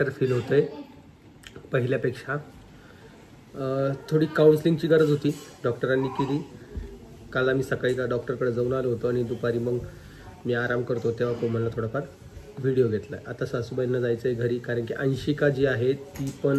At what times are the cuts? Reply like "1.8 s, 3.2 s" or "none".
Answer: none